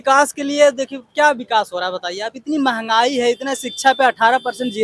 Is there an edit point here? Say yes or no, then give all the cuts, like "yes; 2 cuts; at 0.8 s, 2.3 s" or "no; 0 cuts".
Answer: no; 0 cuts